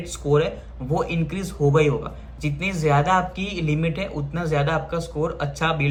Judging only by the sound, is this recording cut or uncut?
uncut